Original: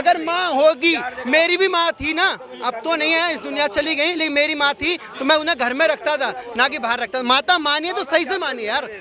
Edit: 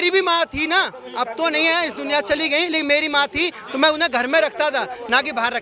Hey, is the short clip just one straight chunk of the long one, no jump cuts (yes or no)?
yes